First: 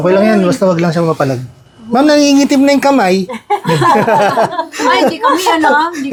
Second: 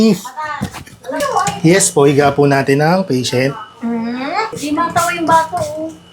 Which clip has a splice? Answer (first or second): second